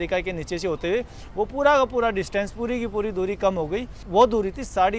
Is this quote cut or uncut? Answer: cut